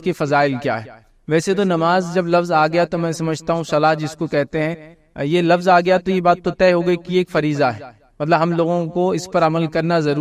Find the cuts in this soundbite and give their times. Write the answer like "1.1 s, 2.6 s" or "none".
none